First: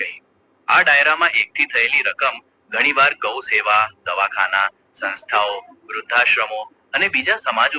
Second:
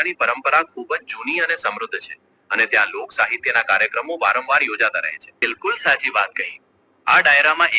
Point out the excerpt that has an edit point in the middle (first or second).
second